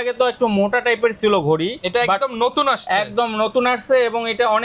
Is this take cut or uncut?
uncut